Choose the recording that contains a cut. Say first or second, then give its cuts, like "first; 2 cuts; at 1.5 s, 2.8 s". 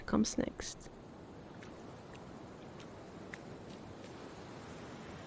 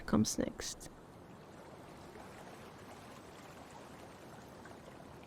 second; 1 cut; at 1.0 s